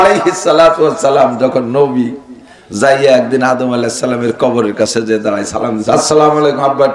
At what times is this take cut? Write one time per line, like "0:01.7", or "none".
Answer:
0:05.9